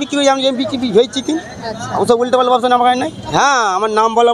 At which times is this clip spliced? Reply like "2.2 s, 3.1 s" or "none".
3.3 s

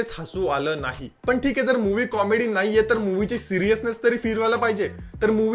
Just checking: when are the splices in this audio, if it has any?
1.1 s

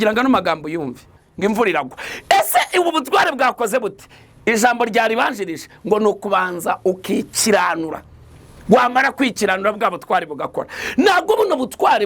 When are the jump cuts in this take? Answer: 1.2 s

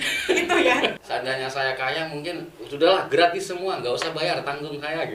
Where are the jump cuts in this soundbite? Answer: 1.0 s

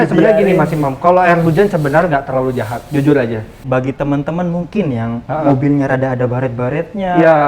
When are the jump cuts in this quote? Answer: 3.6 s

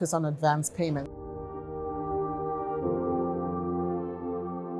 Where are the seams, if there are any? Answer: 1.1 s

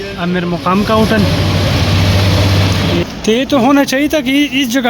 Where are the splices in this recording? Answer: 3.0 s

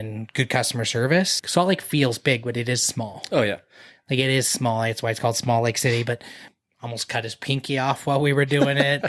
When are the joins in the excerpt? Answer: 1.4 s, 6.4 s

